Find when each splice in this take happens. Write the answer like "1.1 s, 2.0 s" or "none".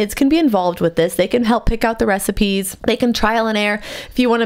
2.7 s